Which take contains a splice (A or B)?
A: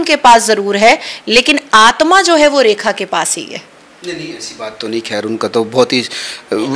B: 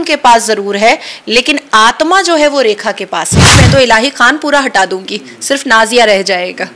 B